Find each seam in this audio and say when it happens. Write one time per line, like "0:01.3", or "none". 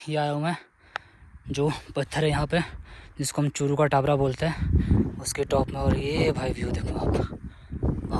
none